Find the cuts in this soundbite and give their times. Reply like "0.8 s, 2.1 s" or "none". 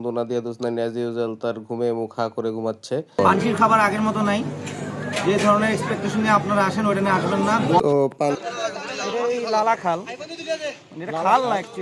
3.2 s, 8.4 s